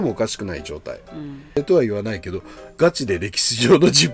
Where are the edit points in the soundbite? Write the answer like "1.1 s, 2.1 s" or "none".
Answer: 1.6 s